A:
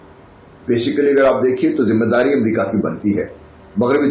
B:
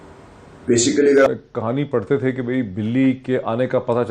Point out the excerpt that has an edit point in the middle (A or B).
B